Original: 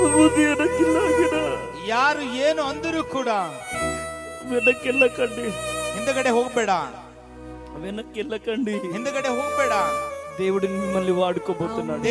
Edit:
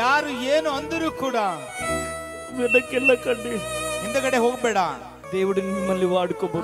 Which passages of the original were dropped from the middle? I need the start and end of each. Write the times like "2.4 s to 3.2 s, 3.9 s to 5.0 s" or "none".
7.1 s to 10.2 s